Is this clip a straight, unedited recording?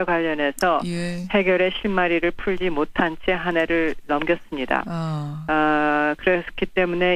yes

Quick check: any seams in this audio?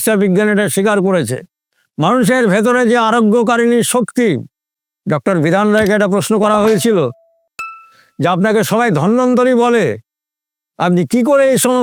no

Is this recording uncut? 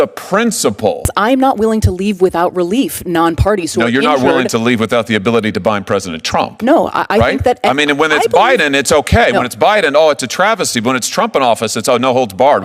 no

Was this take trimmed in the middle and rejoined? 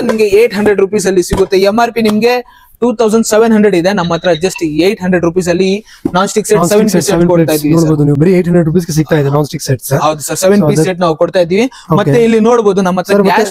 no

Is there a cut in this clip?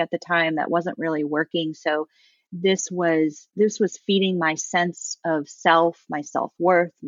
no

